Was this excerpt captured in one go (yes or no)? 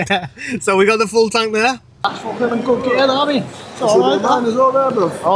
no